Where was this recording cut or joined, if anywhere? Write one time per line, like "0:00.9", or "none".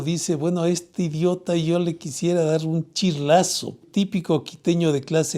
0:03.8